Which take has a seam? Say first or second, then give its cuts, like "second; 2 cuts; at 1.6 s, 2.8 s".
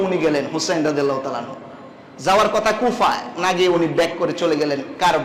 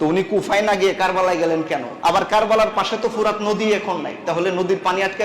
second; 1 cut; at 1.9 s